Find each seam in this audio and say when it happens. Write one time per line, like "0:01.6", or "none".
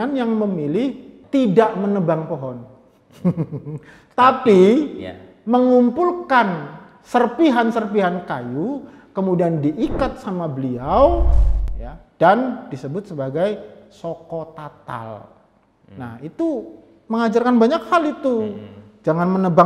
0:01.1